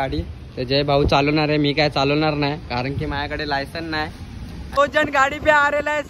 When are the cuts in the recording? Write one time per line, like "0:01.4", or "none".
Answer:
0:04.8